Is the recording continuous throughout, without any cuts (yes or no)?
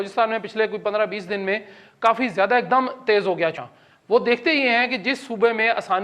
no